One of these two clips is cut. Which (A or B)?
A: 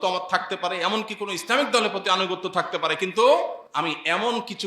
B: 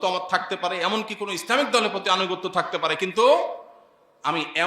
A